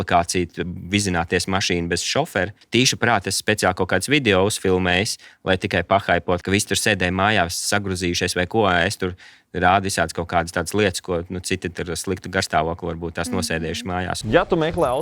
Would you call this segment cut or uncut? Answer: cut